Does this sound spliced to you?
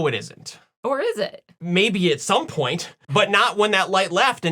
yes; 1 cut; at 1.5 s

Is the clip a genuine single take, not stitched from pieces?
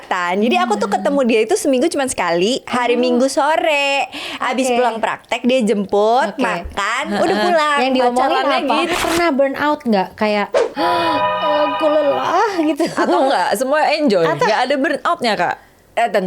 no; 1 cut; at 8.9 s

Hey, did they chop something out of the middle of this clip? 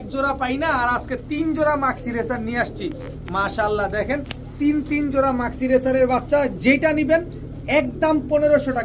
no; 0 cuts

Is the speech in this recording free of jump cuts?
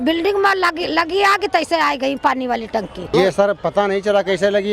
no; 1 cut; at 3.1 s

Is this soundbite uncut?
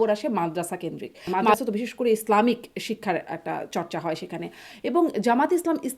no; 1 cut; at 1.5 s

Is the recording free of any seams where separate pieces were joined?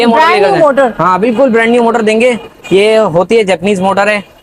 yes; 0 cuts

